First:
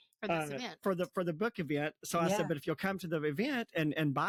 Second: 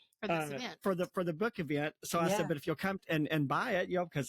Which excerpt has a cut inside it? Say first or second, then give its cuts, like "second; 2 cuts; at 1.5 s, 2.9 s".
second; 1 cut; at 3.0 s